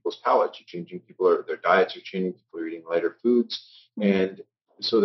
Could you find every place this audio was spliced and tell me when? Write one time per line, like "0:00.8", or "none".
none